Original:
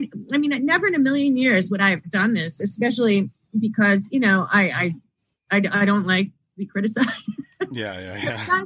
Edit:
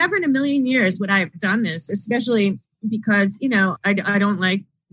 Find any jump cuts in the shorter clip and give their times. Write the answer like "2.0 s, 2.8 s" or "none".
3.8 s